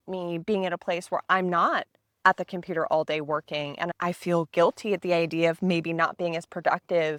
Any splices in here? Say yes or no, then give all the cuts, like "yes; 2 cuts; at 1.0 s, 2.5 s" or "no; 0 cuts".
no; 0 cuts